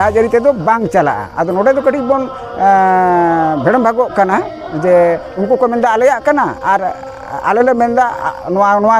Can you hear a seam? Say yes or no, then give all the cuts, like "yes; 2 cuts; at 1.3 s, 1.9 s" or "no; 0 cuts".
no; 0 cuts